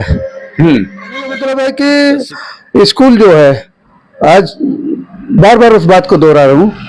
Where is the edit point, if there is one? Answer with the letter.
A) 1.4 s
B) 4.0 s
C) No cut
A